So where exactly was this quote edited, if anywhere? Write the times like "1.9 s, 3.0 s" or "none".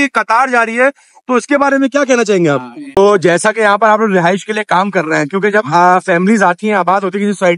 3.0 s